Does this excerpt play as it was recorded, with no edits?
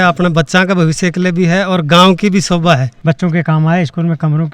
no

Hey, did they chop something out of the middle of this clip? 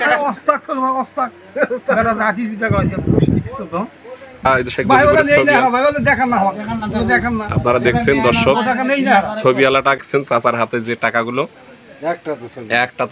yes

